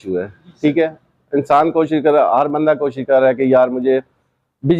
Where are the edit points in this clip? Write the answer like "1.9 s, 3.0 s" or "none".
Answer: none